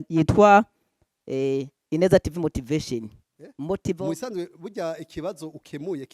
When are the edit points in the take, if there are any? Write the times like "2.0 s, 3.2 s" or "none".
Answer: 4.0 s